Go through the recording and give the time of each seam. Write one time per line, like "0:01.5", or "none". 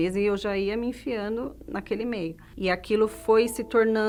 none